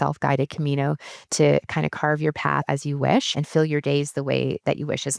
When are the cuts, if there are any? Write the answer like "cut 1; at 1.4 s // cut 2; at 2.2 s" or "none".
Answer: cut 1; at 2.7 s // cut 2; at 3.4 s